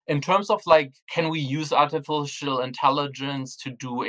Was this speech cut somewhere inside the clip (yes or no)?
yes